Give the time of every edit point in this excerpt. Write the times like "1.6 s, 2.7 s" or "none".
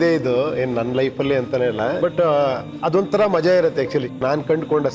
2.0 s, 2.7 s, 4.2 s